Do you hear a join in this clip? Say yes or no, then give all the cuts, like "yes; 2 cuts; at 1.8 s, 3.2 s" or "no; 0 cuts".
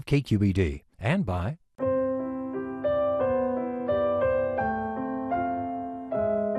yes; 1 cut; at 1.7 s